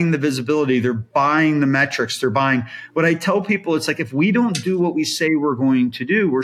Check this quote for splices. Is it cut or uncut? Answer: uncut